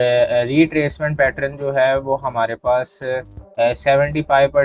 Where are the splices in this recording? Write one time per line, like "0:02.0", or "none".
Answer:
none